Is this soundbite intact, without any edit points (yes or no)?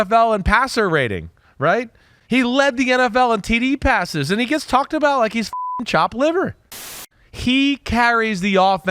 no